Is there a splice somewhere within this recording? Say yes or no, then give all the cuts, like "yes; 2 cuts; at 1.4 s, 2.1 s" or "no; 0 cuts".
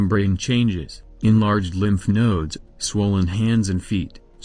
no; 0 cuts